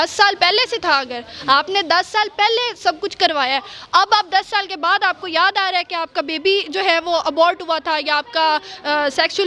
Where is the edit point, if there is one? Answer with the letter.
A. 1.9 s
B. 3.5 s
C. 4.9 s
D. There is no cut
D